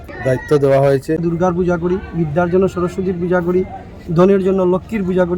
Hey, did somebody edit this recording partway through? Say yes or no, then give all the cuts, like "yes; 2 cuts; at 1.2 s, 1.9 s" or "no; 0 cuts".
yes; 1 cut; at 1.2 s